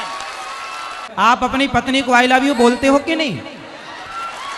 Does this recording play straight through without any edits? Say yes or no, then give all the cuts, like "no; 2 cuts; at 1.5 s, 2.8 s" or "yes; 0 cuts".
no; 1 cut; at 1.0 s